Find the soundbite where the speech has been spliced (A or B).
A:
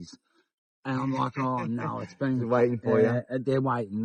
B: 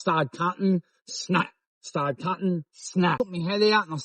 B